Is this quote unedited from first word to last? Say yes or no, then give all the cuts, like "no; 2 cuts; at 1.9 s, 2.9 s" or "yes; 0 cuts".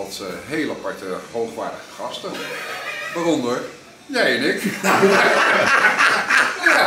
yes; 0 cuts